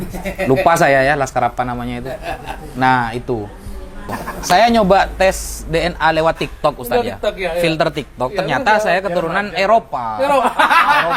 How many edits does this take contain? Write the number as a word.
one